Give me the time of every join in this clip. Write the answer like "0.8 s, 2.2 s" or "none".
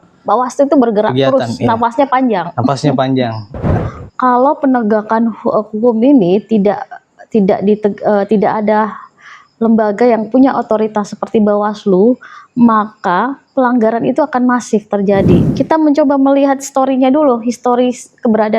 3.6 s, 15.5 s